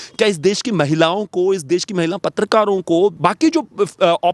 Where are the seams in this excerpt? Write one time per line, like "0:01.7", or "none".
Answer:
0:03.2